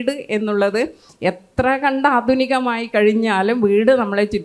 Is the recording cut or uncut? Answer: uncut